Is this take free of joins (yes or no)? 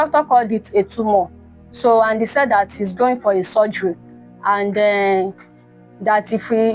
yes